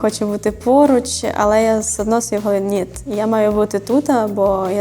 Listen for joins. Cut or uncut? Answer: uncut